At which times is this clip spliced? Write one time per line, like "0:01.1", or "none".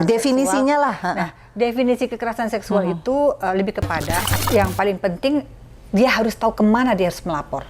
0:04.3